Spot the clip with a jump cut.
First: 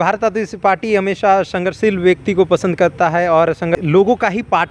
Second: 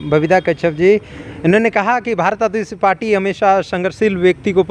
first; 1 cut; at 3.8 s

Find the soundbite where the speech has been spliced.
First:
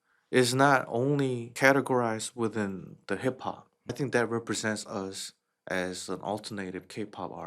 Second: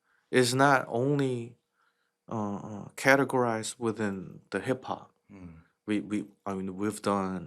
first; 2 cuts; at 1.5 s, 3.9 s

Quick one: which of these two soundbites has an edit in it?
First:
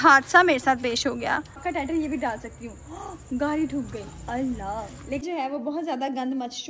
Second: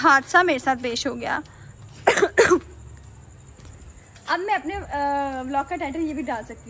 first; 2 cuts; at 1.7 s, 5.2 s

